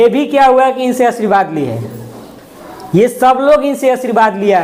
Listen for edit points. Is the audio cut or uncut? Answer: uncut